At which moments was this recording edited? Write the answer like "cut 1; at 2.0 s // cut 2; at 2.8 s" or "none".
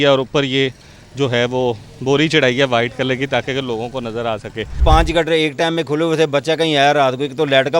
cut 1; at 4.8 s